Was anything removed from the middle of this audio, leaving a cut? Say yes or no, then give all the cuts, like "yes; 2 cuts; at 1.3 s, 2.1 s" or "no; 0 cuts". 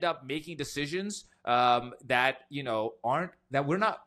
no; 0 cuts